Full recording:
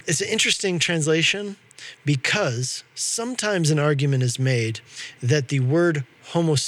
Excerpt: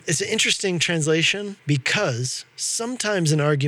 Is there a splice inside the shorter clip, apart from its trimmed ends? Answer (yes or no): yes